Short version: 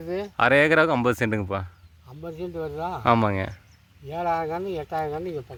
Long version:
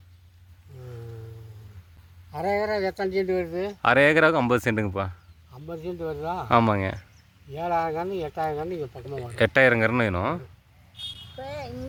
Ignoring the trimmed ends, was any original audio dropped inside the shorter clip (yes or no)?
no